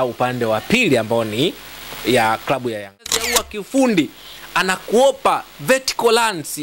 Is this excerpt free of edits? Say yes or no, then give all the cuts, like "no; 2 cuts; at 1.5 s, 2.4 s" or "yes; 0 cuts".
no; 1 cut; at 3.2 s